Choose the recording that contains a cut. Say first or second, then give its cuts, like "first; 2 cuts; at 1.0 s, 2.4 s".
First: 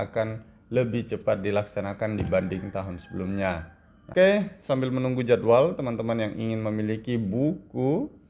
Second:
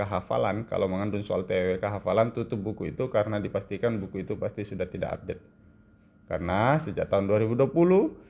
first; 1 cut; at 4.1 s